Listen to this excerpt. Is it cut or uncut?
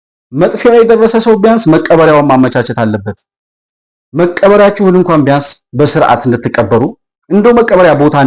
uncut